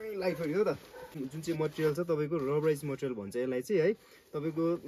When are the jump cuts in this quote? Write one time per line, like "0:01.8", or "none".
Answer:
0:01.3